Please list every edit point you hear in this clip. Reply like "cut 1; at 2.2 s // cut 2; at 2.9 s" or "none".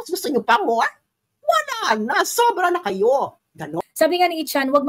cut 1; at 3.7 s